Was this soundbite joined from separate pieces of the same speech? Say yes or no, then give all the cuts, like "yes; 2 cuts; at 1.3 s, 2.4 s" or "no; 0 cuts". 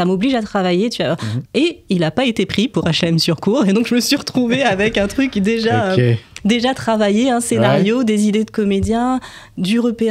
yes; 1 cut; at 1.3 s